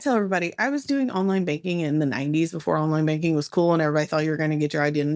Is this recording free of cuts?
yes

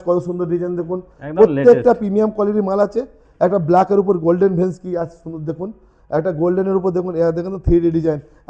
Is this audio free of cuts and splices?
yes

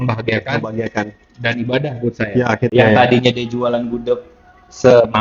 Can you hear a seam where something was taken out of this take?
yes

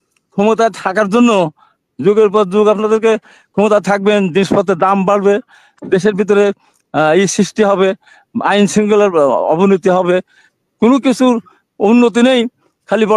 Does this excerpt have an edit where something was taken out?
no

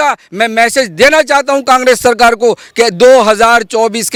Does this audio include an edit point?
no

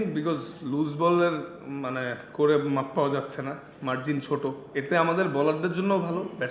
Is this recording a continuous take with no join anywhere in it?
yes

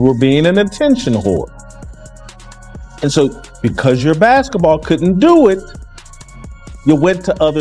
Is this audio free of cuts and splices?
yes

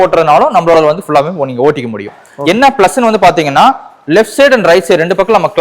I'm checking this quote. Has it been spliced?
yes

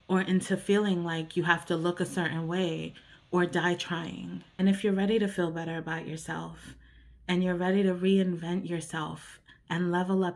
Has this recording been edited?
yes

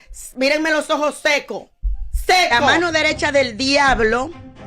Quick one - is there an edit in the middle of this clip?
yes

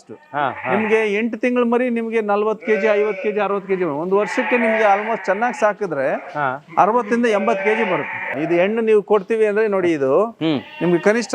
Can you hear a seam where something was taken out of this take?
yes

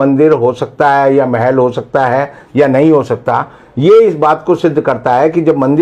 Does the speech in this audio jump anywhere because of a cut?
no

